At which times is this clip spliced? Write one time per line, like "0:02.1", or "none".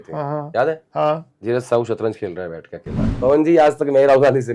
0:01.3
0:03.1